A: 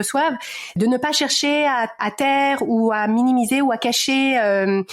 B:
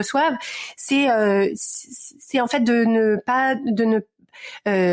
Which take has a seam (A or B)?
A